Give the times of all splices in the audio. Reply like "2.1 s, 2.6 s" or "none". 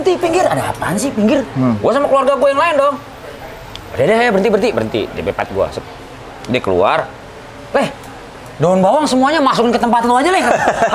none

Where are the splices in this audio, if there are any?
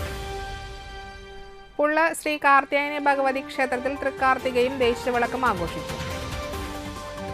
1.1 s

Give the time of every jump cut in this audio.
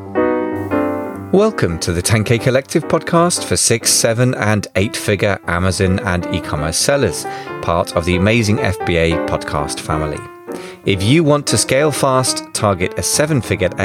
1.2 s

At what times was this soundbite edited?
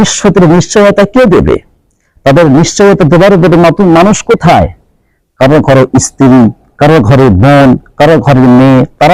none

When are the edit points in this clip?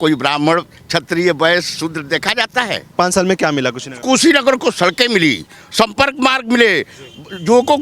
2.9 s

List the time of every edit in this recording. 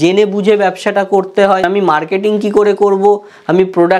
1.6 s

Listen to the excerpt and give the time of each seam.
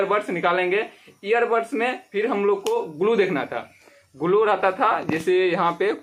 none

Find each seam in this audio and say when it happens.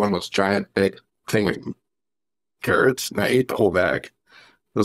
none

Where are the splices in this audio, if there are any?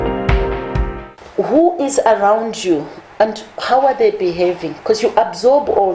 1.0 s

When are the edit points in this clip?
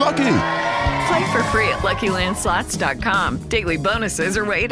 none

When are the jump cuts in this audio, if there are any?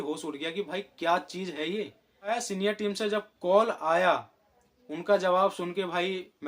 2.4 s

